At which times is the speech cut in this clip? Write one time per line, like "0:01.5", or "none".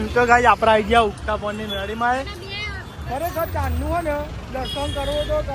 none